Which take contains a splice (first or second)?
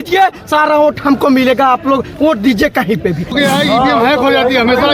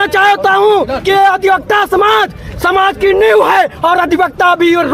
first